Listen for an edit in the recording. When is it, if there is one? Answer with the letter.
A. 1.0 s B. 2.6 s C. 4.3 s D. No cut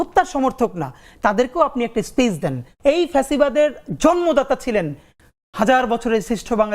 B